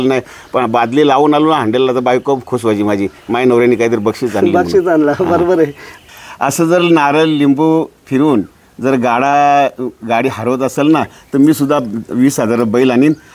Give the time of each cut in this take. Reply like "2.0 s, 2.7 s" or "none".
5.9 s